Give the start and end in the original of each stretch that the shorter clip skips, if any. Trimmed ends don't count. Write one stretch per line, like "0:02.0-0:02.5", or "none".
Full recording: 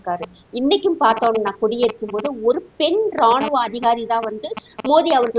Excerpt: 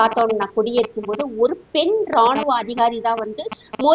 none